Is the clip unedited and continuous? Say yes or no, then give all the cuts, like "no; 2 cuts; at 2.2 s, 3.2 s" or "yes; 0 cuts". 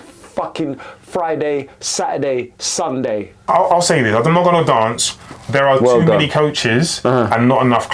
no; 1 cut; at 3.3 s